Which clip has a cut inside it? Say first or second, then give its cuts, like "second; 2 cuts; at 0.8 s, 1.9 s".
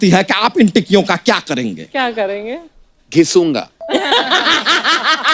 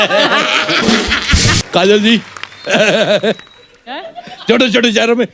second; 1 cut; at 1.6 s